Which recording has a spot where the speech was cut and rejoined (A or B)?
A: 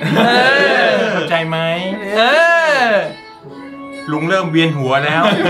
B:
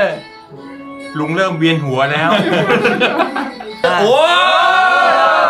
B